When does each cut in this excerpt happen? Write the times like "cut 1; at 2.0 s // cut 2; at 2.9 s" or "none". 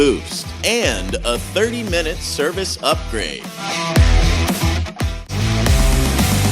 cut 1; at 5.2 s